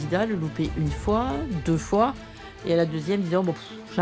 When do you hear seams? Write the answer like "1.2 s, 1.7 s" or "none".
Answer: none